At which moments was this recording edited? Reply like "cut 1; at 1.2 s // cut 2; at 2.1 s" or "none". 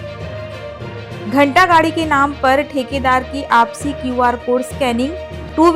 cut 1; at 0.9 s